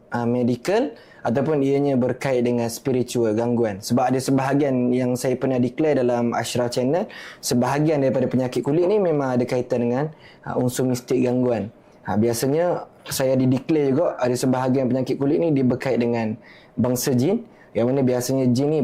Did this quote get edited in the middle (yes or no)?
no